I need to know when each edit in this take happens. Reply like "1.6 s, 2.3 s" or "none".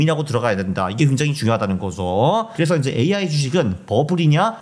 2.5 s